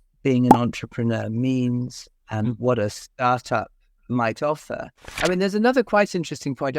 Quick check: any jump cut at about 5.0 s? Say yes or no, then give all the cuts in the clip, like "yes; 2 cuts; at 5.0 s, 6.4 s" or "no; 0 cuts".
yes; 1 cut; at 5.0 s